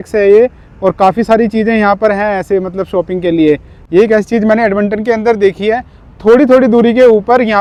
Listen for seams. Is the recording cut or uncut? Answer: uncut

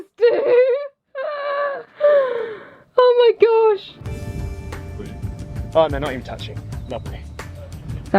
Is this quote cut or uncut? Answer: cut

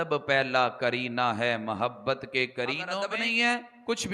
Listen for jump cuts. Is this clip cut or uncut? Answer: cut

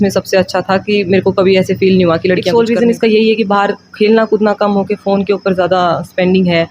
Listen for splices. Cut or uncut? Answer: cut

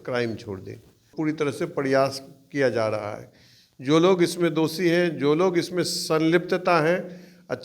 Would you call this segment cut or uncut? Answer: cut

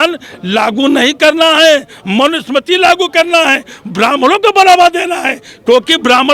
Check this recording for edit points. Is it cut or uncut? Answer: uncut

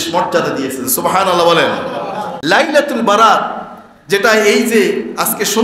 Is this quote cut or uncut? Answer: cut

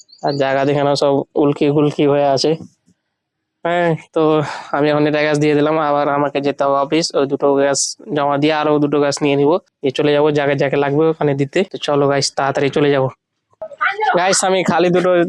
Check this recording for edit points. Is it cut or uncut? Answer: uncut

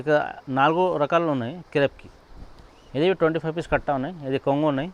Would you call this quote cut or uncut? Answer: uncut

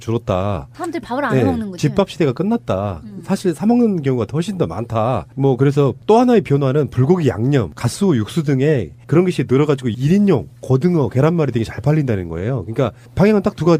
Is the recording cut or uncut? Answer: uncut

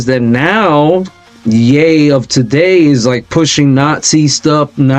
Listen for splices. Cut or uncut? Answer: uncut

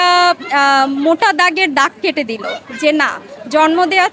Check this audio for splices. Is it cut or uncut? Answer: uncut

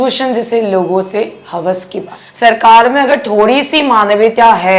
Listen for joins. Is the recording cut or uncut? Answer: cut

